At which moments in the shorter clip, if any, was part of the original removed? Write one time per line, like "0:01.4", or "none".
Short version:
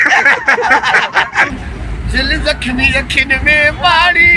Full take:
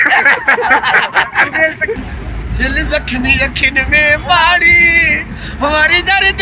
0:01.5